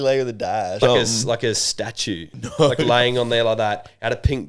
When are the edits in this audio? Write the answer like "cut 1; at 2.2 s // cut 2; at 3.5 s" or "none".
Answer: cut 1; at 0.8 s // cut 2; at 2.3 s